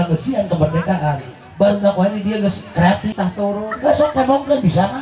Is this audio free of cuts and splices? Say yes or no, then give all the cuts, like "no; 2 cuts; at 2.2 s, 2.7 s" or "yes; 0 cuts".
no; 1 cut; at 3.1 s